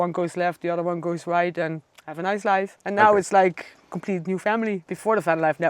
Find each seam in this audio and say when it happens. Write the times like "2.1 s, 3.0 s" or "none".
2.7 s, 4.8 s